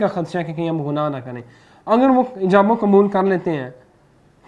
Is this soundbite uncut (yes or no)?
yes